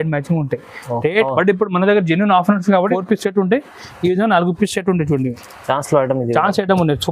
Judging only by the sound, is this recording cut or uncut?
cut